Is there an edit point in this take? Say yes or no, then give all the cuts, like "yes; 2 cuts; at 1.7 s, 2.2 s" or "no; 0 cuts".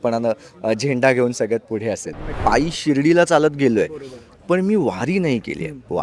yes; 1 cut; at 2.4 s